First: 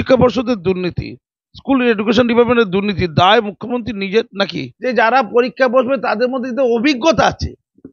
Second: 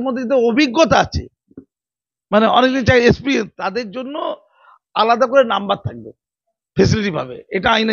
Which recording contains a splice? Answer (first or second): first